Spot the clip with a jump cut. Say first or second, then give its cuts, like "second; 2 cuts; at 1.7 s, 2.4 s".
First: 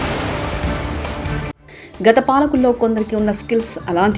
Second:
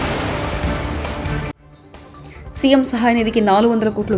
first; 1 cut; at 1.5 s